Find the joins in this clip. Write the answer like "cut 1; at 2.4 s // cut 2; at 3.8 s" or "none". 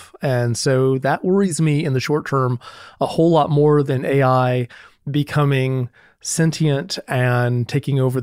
none